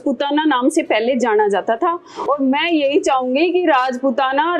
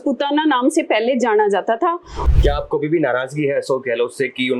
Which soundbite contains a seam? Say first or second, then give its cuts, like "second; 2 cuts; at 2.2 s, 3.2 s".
second; 1 cut; at 2.2 s